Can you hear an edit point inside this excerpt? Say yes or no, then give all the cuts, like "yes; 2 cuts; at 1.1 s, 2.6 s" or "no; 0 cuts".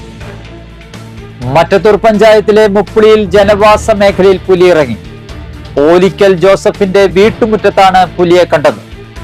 yes; 1 cut; at 1.1 s